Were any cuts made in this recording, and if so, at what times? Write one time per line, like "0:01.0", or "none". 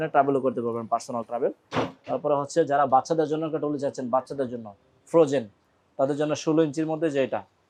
none